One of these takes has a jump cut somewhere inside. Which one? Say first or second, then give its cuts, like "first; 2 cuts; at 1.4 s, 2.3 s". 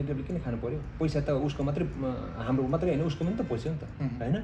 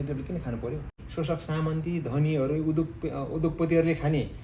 second; 1 cut; at 0.9 s